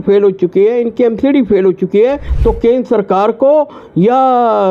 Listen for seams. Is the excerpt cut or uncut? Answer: cut